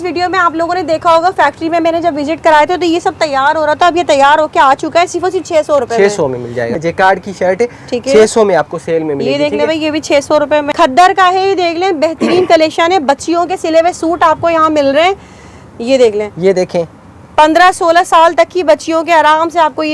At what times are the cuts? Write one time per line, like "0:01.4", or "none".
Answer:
0:06.7
0:10.7